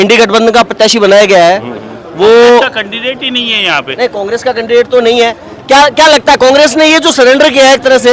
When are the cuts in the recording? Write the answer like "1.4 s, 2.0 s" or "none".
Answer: none